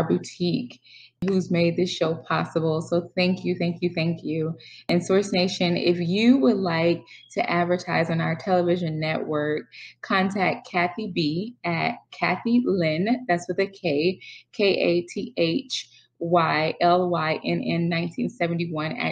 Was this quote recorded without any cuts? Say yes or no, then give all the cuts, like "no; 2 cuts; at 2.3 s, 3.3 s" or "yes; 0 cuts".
no; 2 cuts; at 1.2 s, 4.8 s